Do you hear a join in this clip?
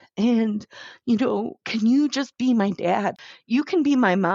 yes; 1 cut; at 3.2 s

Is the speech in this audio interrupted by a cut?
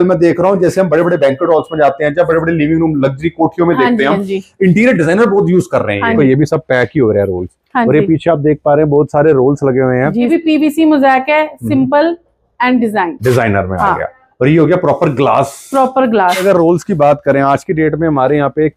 yes; 3 cuts; at 6.2 s, 10.3 s, 16.4 s

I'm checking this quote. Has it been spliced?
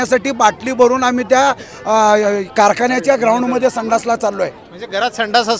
no; 0 cuts

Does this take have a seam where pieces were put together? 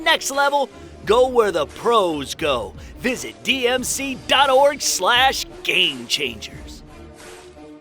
yes; 1 cut; at 6.4 s

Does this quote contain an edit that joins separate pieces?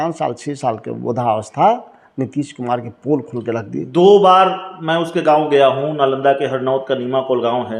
no; 0 cuts

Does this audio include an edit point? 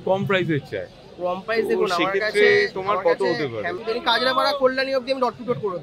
yes; 1 cut; at 3.8 s

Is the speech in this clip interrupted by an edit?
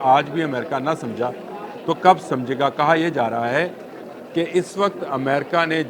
no; 0 cuts

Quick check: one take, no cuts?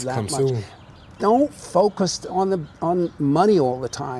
yes; 0 cuts

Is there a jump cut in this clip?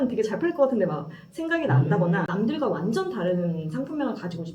yes; 1 cut; at 2.3 s

